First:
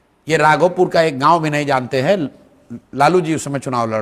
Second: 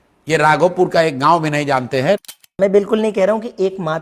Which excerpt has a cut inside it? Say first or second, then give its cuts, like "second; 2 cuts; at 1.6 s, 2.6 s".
second; 1 cut; at 2.4 s